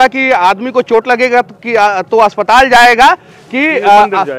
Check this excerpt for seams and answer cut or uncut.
uncut